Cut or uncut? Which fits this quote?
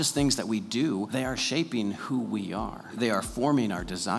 cut